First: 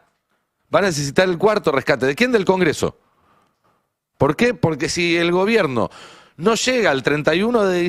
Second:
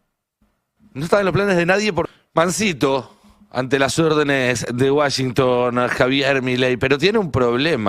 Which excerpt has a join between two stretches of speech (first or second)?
second